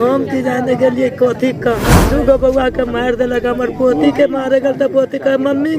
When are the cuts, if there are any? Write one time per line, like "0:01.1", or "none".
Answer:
0:01.9